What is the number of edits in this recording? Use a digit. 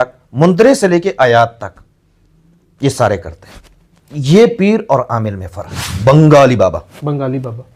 1